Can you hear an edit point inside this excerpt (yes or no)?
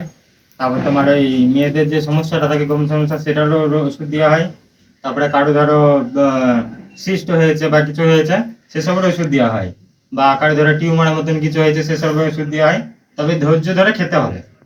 no